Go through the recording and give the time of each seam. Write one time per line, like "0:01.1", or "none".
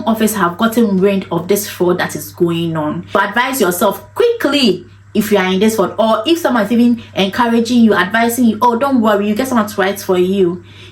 0:03.1

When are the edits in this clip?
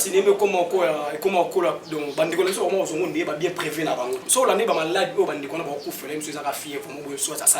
0:04.2

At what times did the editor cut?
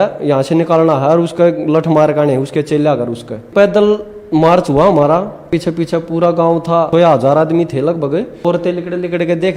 0:03.5
0:05.5
0:06.9
0:08.4

